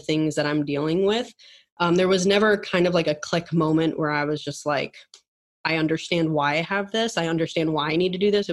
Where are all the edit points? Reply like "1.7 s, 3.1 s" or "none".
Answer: none